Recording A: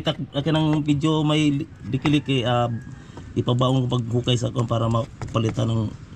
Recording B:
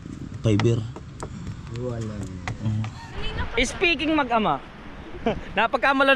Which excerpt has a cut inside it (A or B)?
B